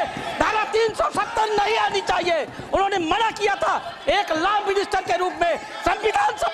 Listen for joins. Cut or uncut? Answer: uncut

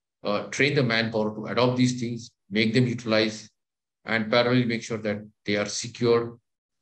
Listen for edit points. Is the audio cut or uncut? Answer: uncut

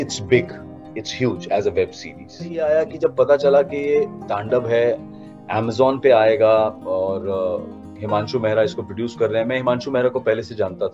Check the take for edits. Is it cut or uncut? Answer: cut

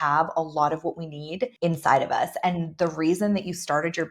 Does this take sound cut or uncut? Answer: cut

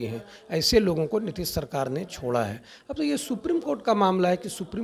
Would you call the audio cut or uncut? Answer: uncut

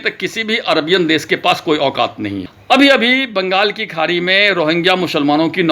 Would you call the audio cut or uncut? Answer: cut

